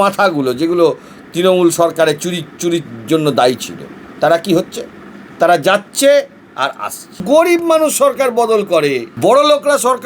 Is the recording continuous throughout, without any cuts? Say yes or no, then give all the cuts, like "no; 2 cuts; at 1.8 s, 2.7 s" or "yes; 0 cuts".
no; 2 cuts; at 7.2 s, 9.1 s